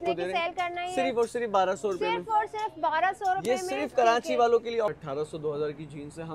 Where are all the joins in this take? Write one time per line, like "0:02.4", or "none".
0:04.9